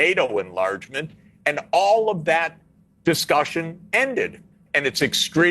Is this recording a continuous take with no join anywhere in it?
no; 1 cut; at 4.3 s

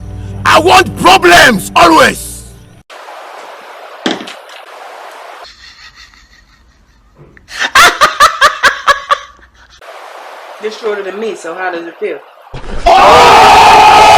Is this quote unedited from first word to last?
no; 1 cut; at 5.5 s

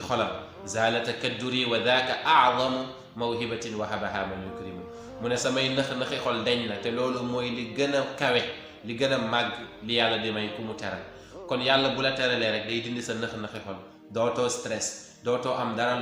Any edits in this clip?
no; 0 cuts

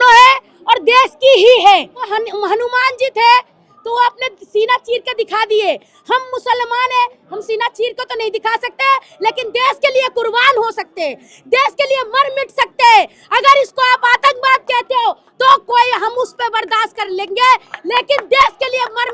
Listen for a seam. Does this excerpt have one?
yes; 1 cut; at 2.1 s

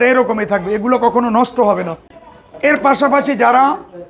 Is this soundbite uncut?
yes; 0 cuts

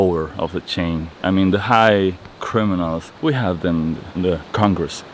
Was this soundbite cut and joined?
yes; 1 cut; at 3.1 s

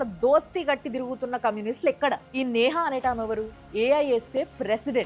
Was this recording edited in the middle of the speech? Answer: no; 0 cuts

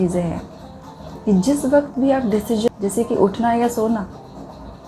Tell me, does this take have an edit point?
yes; 1 cut; at 2.7 s

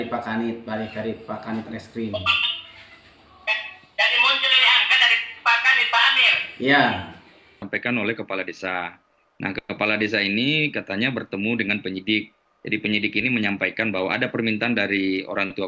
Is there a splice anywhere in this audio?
yes; 1 cut; at 7.7 s

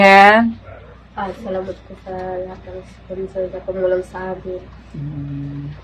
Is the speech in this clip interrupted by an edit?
no; 0 cuts

